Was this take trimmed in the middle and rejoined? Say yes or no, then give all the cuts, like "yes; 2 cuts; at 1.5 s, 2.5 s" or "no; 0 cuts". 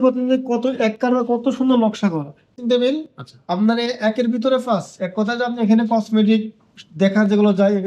yes; 1 cut; at 2.5 s